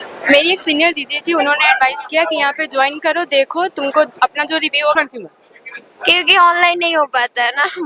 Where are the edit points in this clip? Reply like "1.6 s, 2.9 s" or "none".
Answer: 4.9 s

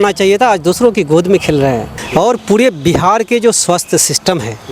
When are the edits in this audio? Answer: 2.0 s

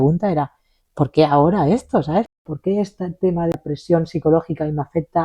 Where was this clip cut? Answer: 2.3 s, 3.5 s

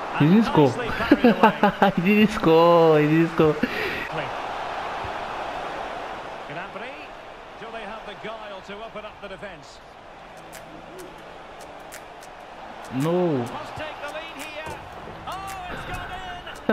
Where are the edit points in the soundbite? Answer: 4.0 s

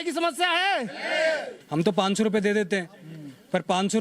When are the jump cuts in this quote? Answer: 1.6 s

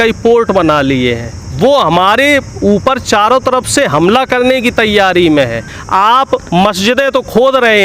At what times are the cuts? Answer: 5.8 s

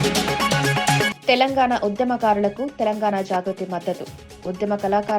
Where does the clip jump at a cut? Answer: 1.1 s

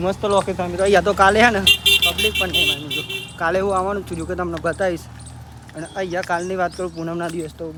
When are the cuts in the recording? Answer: none

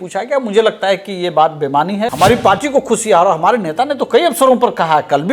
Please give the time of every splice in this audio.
2.1 s

